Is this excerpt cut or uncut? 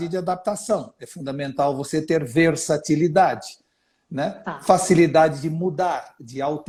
uncut